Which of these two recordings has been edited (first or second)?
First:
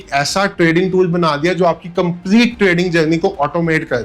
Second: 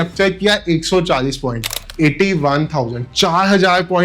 second